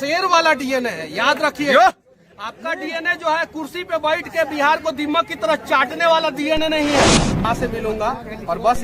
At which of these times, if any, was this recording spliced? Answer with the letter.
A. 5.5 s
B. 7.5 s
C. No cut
B